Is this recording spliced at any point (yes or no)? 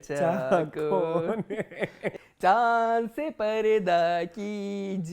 yes